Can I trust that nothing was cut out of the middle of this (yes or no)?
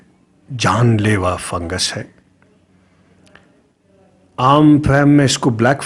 yes